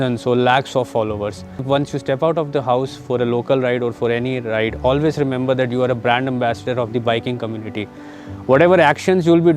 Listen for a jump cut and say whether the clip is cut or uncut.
cut